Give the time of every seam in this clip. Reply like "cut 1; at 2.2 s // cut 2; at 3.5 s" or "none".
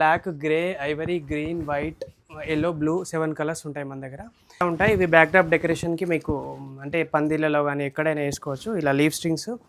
cut 1; at 4.6 s